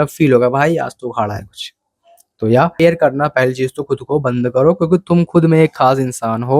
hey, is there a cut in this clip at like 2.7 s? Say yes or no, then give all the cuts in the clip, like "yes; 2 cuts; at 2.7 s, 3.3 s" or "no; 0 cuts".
yes; 1 cut; at 2.7 s